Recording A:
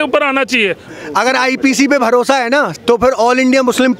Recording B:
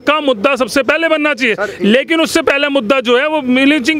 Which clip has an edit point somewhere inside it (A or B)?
A